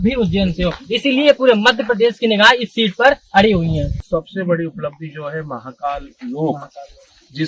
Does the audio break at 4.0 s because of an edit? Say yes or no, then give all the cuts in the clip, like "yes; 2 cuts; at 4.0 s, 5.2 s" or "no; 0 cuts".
yes; 1 cut; at 4.0 s